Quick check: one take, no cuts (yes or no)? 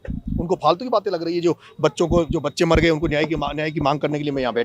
yes